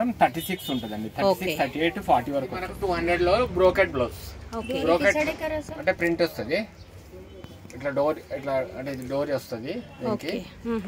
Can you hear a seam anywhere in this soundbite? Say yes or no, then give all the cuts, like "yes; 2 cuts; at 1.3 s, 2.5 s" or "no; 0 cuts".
yes; 1 cut; at 2.9 s